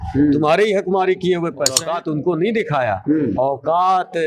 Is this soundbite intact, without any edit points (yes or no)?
no